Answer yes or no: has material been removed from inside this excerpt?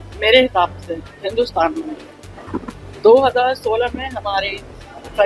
no